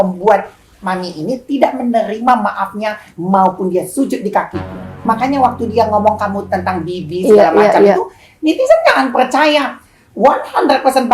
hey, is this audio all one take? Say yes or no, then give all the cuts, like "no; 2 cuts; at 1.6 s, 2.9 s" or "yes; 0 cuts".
no; 1 cut; at 4.9 s